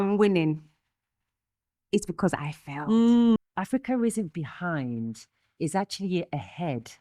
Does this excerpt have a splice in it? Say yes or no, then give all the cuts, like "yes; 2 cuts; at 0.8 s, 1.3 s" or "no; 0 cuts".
yes; 1 cut; at 3.5 s